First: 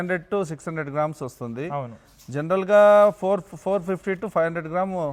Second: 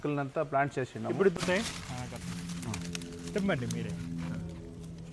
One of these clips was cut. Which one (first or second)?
second